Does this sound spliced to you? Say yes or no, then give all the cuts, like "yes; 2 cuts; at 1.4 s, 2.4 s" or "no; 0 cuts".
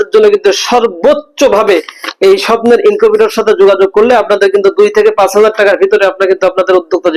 no; 0 cuts